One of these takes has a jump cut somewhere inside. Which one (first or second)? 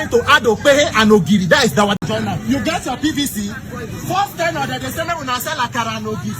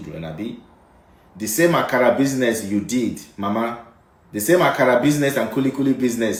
first